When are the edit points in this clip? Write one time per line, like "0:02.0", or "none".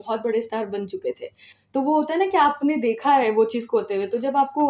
none